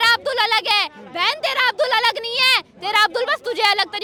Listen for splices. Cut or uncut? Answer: uncut